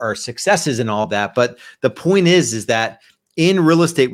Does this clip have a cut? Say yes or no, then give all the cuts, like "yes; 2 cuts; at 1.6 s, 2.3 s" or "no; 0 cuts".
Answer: no; 0 cuts